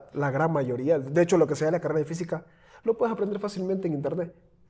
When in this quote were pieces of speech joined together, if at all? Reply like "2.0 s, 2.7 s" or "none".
none